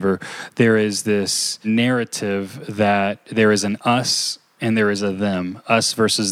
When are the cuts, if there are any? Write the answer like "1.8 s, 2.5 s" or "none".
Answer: 1.7 s, 3.2 s

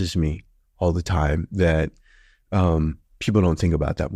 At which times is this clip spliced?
none

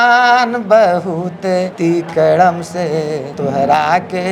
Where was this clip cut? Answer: 1.7 s, 3.3 s

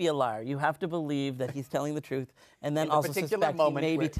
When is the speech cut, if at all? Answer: none

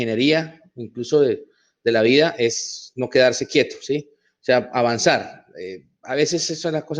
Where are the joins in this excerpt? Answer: none

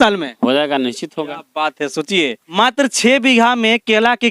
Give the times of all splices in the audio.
2.4 s

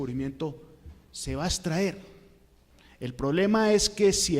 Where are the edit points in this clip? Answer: 1.2 s

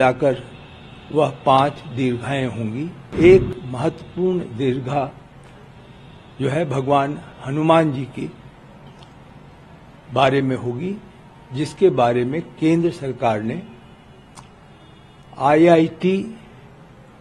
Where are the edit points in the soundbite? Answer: 3.0 s

